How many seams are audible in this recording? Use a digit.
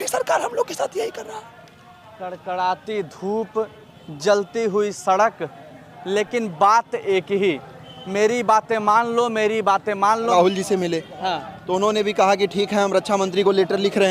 1